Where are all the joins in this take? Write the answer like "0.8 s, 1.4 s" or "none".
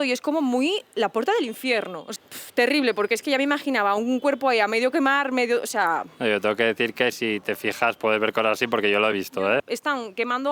2.0 s, 9.4 s